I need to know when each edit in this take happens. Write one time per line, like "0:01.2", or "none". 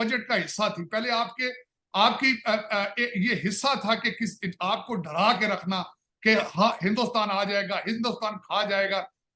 none